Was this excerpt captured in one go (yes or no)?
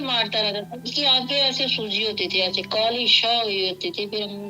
yes